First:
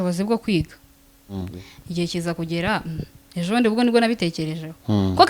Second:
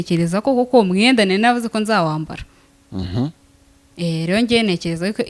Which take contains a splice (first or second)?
first